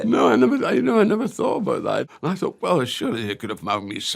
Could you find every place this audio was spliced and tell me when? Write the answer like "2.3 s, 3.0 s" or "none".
2.0 s

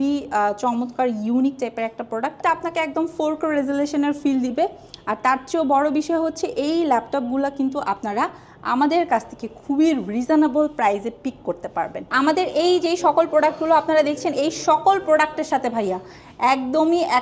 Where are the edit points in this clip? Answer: 2.4 s, 12.1 s

